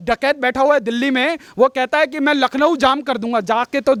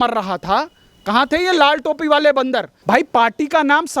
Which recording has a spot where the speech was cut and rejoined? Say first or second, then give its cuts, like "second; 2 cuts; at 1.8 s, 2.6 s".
second; 1 cut; at 2.7 s